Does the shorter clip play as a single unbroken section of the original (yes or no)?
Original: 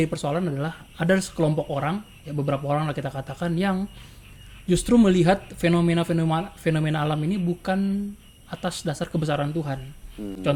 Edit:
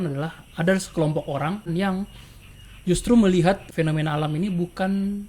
no